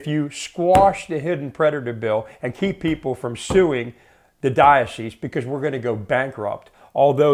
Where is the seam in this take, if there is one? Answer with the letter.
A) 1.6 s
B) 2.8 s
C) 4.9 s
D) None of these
D